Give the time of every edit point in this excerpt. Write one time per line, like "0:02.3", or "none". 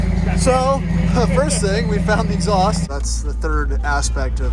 0:02.9